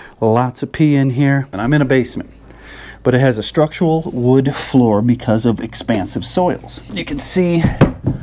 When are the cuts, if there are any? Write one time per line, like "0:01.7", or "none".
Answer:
0:01.5
0:06.9